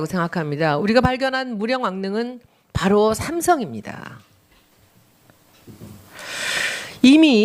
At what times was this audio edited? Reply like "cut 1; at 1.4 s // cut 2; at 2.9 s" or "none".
none